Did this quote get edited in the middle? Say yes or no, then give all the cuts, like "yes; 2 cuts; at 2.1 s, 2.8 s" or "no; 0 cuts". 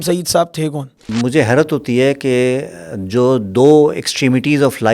yes; 1 cut; at 1.0 s